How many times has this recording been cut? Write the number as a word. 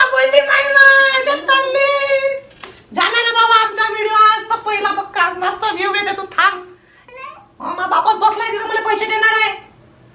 one